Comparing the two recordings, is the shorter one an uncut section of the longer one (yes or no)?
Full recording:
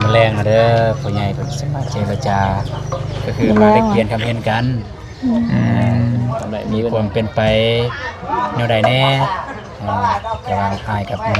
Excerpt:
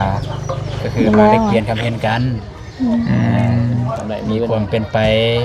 yes